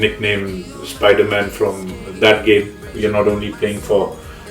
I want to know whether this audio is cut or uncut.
cut